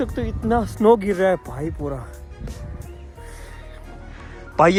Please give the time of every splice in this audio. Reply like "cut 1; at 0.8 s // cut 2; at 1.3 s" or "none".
none